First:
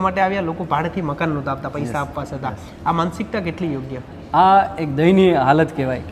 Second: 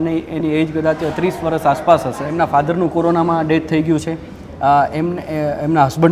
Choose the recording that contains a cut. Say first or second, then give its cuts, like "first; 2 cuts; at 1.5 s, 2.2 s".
second; 1 cut; at 2.2 s